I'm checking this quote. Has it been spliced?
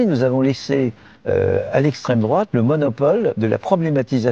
no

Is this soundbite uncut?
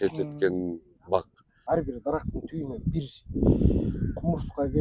no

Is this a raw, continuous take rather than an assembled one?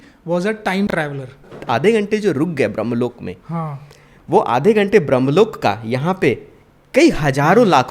no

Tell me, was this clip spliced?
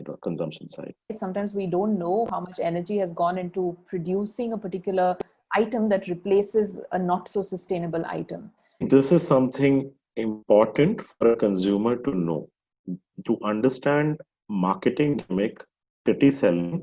yes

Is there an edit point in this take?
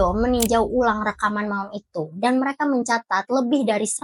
no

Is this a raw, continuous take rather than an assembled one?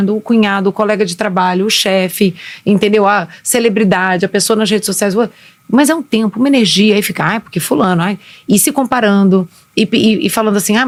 yes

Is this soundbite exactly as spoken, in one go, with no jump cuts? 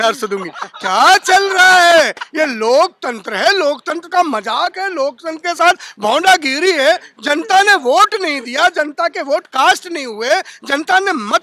yes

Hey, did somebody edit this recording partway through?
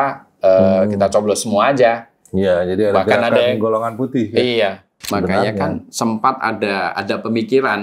yes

